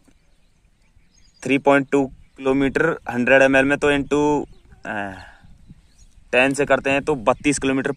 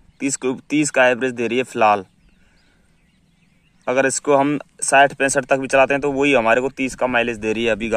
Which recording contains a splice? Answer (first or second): first